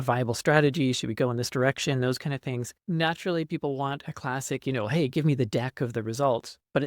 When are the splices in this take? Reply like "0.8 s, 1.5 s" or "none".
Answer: 2.8 s